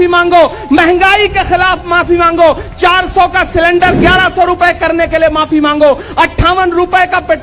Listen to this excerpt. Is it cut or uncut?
uncut